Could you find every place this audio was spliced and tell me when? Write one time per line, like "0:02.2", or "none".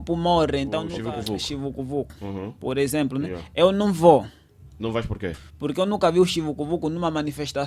0:00.9